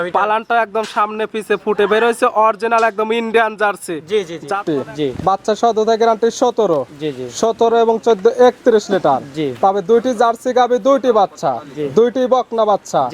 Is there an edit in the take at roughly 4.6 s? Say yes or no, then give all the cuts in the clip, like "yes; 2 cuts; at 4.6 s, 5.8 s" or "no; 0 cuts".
yes; 1 cut; at 4.6 s